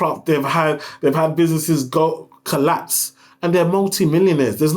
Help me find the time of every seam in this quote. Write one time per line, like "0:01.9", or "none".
none